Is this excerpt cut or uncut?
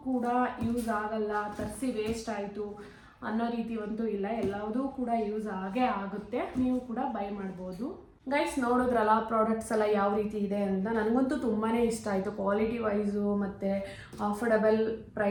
uncut